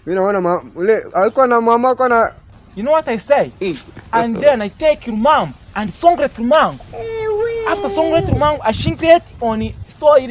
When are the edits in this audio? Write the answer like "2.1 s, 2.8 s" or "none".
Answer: 2.5 s